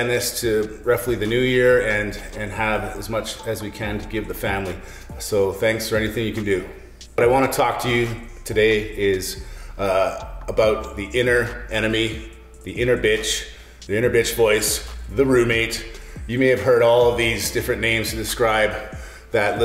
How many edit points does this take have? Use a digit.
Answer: 1